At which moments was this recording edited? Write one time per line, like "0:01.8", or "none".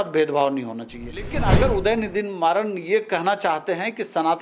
0:01.3